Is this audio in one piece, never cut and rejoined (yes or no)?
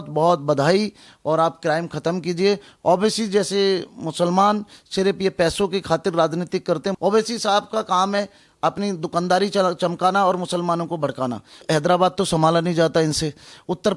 no